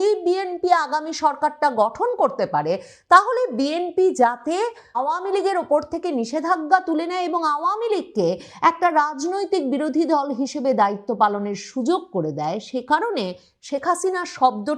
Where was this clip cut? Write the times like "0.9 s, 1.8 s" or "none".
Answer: 5.0 s